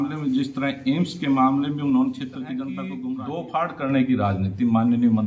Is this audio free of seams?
no; 1 cut; at 3.0 s

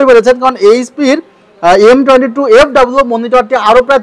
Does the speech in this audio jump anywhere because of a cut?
no; 0 cuts

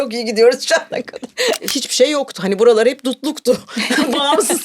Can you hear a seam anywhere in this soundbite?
yes; 1 cut; at 1.6 s

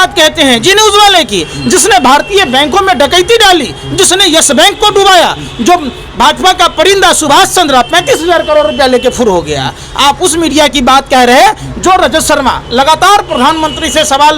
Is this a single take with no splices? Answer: yes; 0 cuts

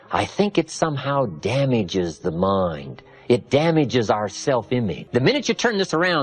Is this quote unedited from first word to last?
no; 1 cut; at 5.0 s

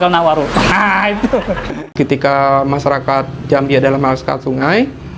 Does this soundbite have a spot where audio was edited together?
yes; 1 cut; at 1.7 s

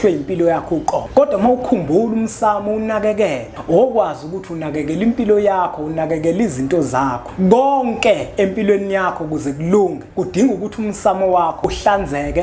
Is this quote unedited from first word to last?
no; 5 cuts; at 1.0 s, 3.5 s, 7.2 s, 10.0 s, 11.6 s

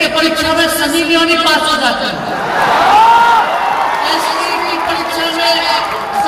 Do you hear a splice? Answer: no; 0 cuts

